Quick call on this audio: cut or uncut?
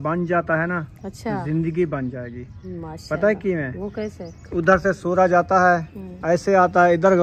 uncut